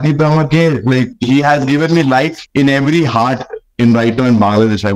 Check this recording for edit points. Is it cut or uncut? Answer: cut